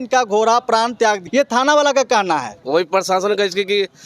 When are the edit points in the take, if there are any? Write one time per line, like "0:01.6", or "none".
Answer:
0:01.3
0:02.5